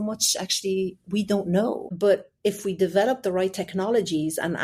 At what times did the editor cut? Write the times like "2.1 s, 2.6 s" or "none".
1.8 s